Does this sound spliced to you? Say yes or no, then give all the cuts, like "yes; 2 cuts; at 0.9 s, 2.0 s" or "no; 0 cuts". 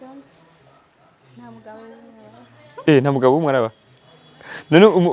no; 0 cuts